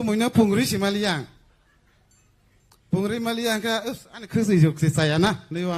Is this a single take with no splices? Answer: no; 1 cut; at 3.6 s

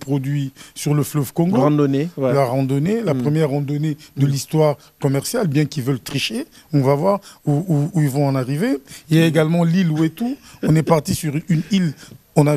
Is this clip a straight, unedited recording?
yes; 0 cuts

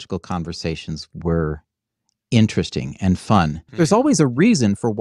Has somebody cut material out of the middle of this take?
yes; 1 cut; at 3.6 s

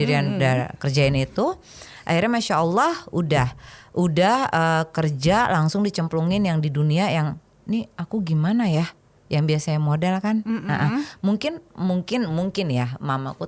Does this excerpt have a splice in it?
no; 0 cuts

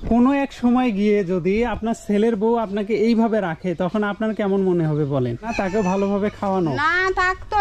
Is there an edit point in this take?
yes; 1 cut; at 5.5 s

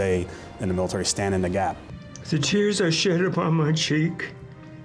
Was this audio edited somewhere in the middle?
yes; 1 cut; at 1.9 s

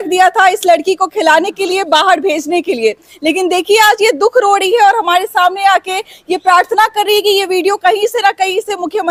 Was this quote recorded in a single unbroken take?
yes; 0 cuts

